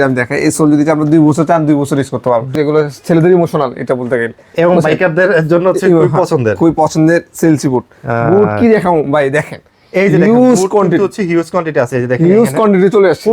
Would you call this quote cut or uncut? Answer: cut